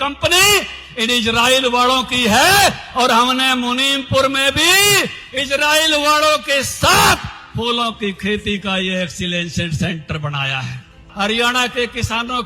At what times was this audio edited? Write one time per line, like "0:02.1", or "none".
0:11.0